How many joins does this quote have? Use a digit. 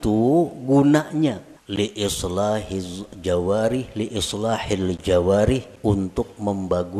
2